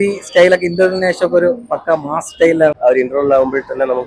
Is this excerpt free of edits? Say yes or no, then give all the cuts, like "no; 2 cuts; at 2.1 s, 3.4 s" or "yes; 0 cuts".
no; 1 cut; at 2.8 s